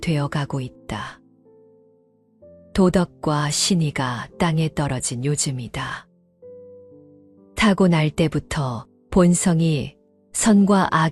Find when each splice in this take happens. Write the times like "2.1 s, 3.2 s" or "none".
none